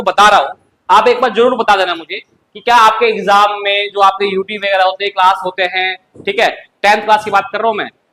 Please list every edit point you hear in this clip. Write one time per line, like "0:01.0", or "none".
none